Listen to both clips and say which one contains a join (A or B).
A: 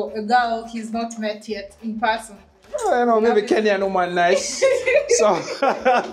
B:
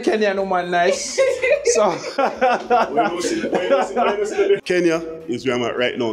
B